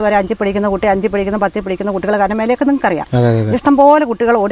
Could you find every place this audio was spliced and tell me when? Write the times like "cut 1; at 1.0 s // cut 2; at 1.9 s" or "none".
none

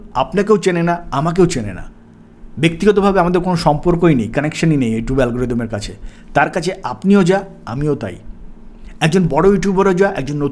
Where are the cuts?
none

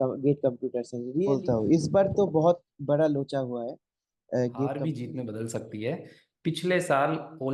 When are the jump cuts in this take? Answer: cut 1; at 1.1 s // cut 2; at 4.8 s

